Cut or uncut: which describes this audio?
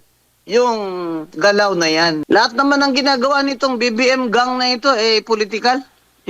cut